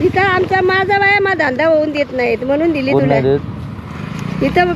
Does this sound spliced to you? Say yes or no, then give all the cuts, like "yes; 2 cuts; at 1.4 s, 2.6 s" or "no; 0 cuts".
no; 0 cuts